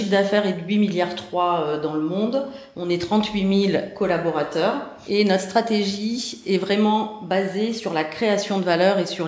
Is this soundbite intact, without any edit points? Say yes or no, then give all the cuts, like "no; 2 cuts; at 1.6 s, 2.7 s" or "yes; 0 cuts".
yes; 0 cuts